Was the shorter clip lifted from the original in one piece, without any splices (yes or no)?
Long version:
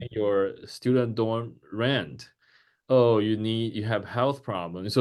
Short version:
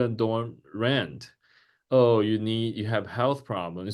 yes